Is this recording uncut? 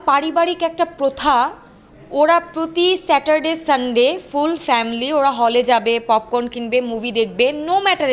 yes; 0 cuts

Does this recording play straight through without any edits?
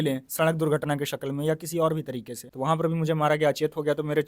no; 1 cut; at 2.4 s

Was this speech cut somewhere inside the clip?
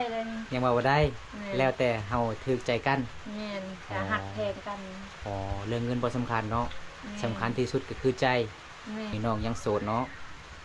yes; 1 cut; at 9.1 s

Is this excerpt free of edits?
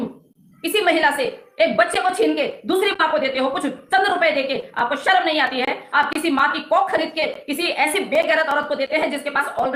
yes; 0 cuts

